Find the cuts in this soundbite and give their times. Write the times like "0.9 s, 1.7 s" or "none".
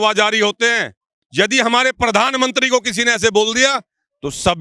1.2 s